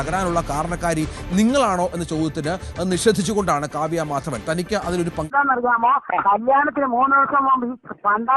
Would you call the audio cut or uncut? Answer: cut